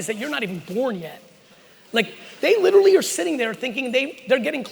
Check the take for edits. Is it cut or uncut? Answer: uncut